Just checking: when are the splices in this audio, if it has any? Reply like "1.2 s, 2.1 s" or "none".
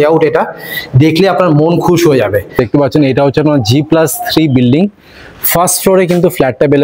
2.6 s